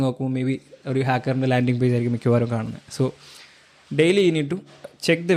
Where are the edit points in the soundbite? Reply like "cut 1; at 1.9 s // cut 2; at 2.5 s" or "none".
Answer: none

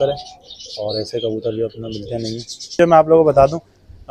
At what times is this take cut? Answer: cut 1; at 2.8 s

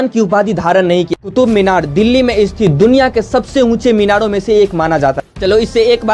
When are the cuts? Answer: cut 1; at 1.2 s // cut 2; at 5.3 s

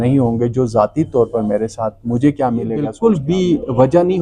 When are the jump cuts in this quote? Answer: cut 1; at 2.9 s

